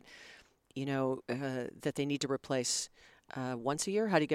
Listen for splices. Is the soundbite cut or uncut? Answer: uncut